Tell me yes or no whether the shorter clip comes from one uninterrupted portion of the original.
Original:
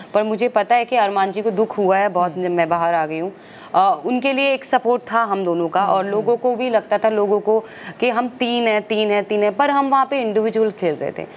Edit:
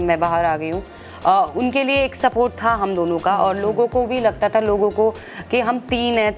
yes